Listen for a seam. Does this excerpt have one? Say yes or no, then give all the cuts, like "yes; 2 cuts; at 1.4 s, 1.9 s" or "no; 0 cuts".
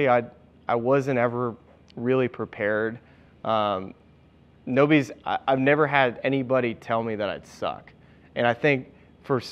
no; 0 cuts